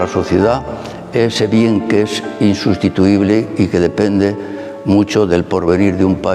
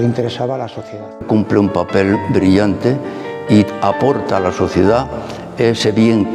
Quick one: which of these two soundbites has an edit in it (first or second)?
second